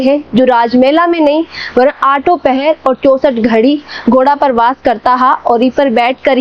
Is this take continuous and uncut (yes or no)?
yes